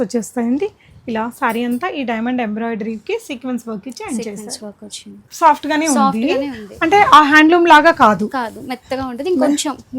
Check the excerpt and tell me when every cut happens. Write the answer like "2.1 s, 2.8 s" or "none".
5.2 s